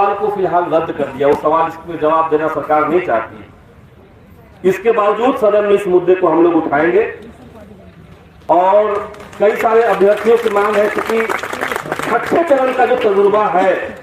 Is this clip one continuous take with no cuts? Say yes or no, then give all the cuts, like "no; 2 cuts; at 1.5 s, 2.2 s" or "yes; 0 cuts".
yes; 0 cuts